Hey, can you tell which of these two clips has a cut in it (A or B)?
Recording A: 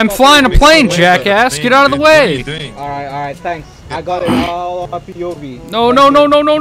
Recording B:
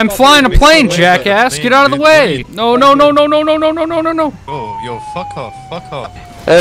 B